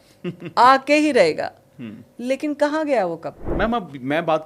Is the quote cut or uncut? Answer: cut